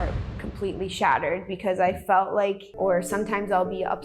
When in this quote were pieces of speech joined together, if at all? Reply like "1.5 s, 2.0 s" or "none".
2.7 s